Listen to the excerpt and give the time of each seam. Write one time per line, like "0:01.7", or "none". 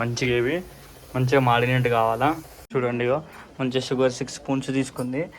0:02.5